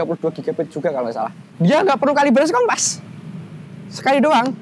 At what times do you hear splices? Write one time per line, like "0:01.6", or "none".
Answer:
0:01.4